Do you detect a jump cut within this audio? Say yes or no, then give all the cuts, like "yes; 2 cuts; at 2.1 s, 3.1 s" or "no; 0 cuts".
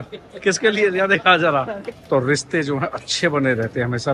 yes; 1 cut; at 1.9 s